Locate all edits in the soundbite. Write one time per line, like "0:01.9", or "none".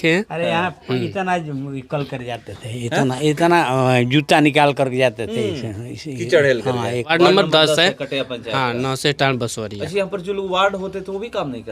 0:07.1